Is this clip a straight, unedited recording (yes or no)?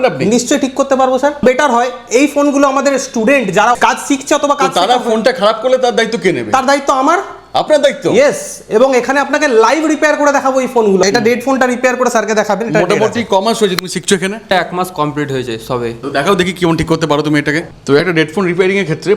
no